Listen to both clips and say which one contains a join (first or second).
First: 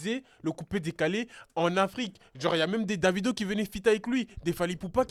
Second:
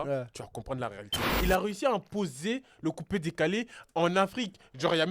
second